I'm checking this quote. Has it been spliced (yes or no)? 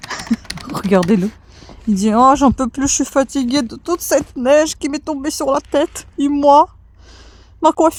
no